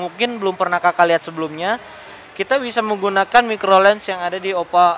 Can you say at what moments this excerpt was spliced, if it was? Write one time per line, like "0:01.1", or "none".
none